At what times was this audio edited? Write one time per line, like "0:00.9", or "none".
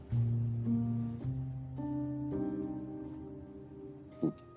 none